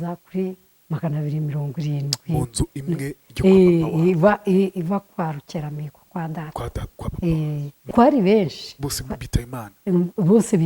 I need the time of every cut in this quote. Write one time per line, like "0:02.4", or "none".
0:07.7